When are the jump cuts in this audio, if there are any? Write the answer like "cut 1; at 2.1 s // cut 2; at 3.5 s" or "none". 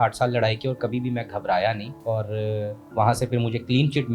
cut 1; at 1.9 s

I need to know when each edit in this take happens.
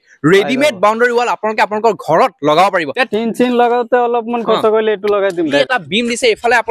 cut 1; at 2.9 s // cut 2; at 5.6 s

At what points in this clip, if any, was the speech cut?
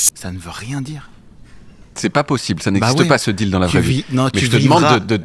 none

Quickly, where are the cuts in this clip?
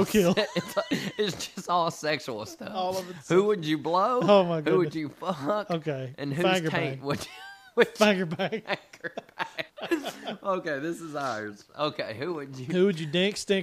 cut 1; at 9.7 s

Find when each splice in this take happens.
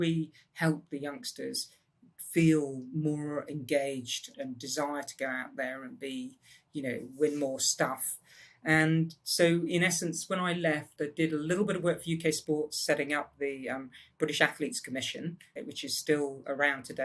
cut 1; at 4.3 s // cut 2; at 15.5 s

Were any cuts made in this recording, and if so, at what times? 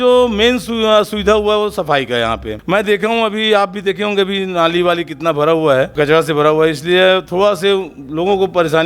cut 1; at 2.5 s // cut 2; at 5.9 s

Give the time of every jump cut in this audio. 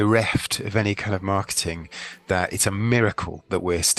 none

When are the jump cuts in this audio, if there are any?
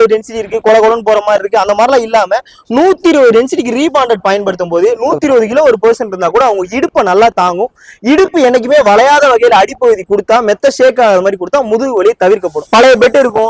cut 1; at 12.6 s

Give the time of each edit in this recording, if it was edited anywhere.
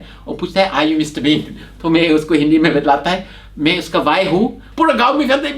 cut 1; at 4.6 s

